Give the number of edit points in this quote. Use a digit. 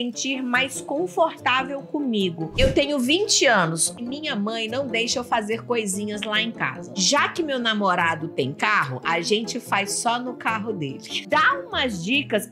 4